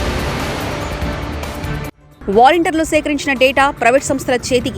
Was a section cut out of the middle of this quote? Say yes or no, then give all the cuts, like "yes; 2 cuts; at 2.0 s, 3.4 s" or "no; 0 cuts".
yes; 1 cut; at 2.1 s